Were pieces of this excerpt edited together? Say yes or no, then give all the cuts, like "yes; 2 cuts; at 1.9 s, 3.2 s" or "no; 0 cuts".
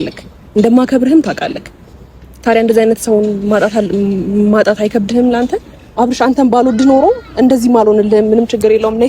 yes; 1 cut; at 5.9 s